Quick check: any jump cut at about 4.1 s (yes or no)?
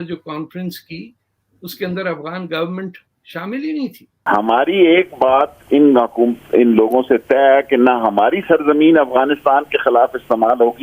yes